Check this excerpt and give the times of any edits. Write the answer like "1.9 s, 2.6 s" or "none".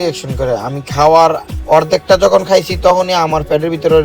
none